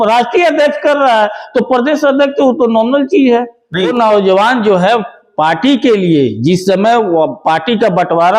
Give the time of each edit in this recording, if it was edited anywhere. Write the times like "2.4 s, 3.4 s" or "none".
3.9 s